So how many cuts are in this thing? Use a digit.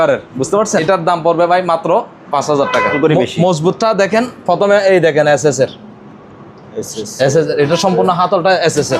2